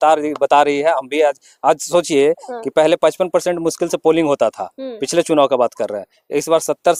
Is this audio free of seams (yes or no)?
yes